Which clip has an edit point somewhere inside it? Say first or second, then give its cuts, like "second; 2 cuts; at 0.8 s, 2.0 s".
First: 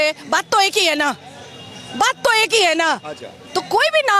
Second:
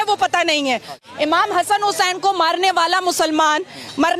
second; 1 cut; at 1.0 s